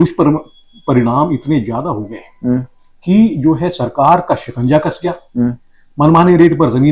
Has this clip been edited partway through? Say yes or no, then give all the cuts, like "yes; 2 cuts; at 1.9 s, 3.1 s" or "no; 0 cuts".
no; 0 cuts